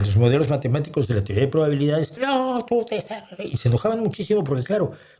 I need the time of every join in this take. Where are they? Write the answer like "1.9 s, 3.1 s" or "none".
2.1 s